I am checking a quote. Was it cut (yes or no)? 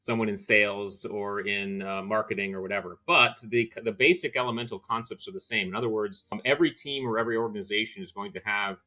yes